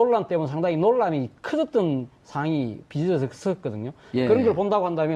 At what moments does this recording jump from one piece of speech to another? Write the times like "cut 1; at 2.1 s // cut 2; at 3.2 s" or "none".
cut 1; at 3.3 s